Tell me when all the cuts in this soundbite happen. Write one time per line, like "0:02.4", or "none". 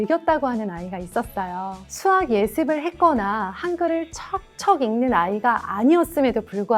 0:01.8